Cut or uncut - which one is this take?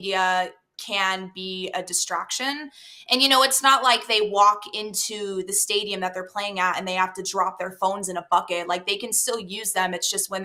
uncut